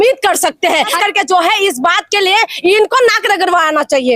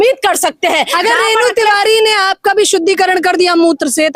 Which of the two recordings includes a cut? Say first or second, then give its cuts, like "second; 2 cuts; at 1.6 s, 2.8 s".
first; 1 cut; at 0.9 s